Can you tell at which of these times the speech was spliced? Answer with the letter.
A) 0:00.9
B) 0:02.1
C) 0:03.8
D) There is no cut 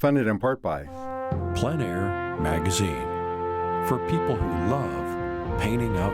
A